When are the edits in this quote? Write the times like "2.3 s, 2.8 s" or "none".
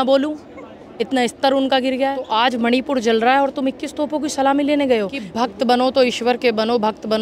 2.3 s, 5.2 s